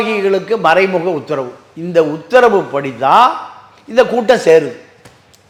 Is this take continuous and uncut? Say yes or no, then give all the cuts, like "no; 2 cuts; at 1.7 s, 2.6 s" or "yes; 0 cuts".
yes; 0 cuts